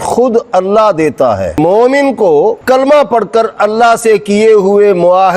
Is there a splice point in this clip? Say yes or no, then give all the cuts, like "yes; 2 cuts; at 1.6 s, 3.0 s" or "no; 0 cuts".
yes; 1 cut; at 1.6 s